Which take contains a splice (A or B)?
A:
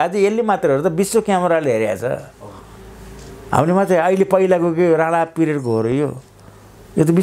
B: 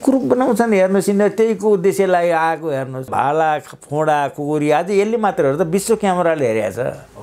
B